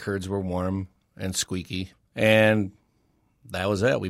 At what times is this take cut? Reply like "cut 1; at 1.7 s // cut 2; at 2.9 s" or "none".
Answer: cut 1; at 1.9 s